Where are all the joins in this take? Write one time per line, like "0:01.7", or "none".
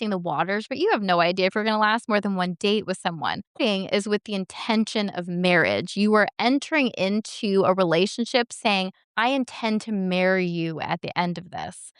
0:03.6
0:09.0